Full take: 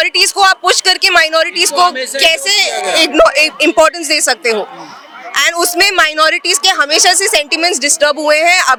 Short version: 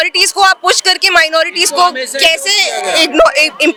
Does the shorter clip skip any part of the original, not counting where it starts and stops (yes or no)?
no